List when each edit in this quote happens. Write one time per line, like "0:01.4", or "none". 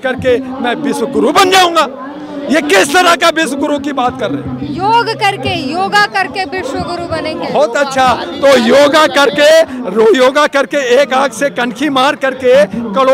none